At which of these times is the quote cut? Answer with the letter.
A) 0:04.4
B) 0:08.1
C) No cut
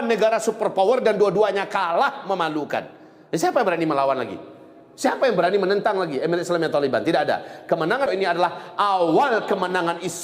B